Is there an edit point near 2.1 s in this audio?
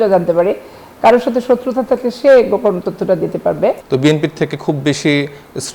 no; 1 cut; at 3.8 s

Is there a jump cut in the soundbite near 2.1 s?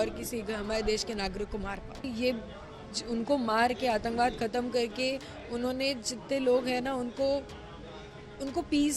yes; 1 cut; at 2.1 s

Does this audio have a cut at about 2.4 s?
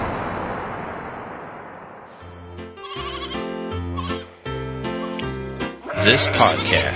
yes; 1 cut; at 2.4 s

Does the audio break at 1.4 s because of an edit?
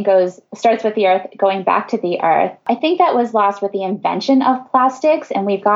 no; 1 cut; at 2.6 s

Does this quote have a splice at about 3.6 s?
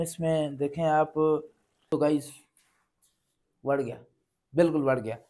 no; 1 cut; at 1.9 s

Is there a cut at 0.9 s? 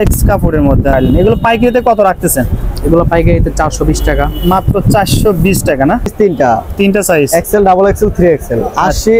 yes; 2 cuts; at 0.9 s, 6.1 s

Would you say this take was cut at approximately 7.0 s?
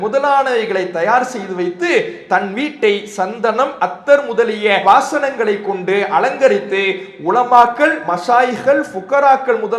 no; 0 cuts

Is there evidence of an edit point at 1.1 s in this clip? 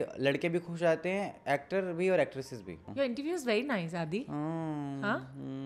no; 1 cut; at 2.8 s

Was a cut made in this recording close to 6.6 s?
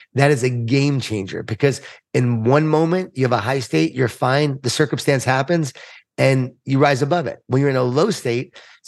no; 0 cuts

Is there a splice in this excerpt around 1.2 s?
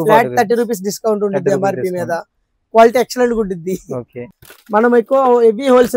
no; 1 cut; at 4.2 s

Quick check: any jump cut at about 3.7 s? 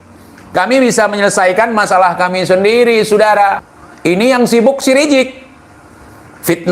yes; 1 cut; at 3.7 s

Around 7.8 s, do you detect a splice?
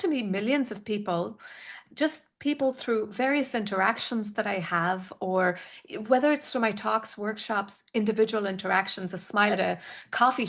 no; 1 cut; at 9.5 s

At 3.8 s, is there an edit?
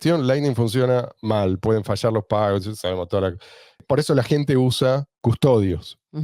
yes; 2 cuts; at 3.8 s, 5.1 s

